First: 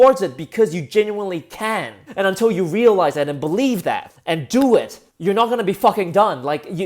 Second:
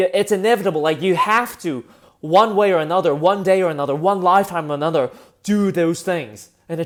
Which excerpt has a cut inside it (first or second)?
first